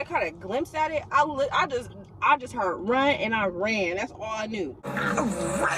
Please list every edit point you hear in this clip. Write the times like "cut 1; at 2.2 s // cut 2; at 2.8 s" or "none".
cut 1; at 4.8 s